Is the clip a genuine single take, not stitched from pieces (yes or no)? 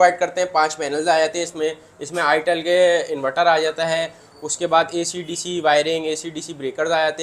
yes